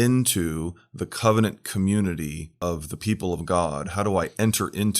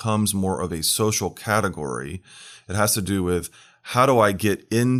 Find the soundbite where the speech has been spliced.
first; 1 cut; at 2.5 s

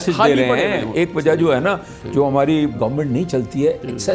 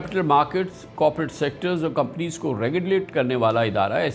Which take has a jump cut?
first; 2 cuts; at 0.9 s, 2.8 s

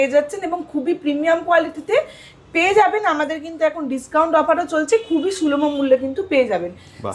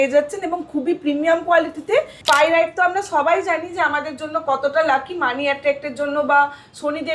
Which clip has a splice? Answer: second; 1 cut; at 2.1 s

